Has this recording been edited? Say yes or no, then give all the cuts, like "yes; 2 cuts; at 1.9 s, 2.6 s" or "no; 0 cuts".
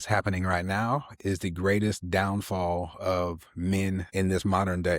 yes; 1 cut; at 4.1 s